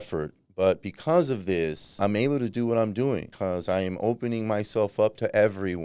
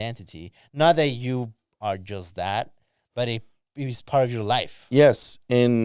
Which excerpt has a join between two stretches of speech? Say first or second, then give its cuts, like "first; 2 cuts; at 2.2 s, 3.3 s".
first; 2 cuts; at 1.9 s, 3.3 s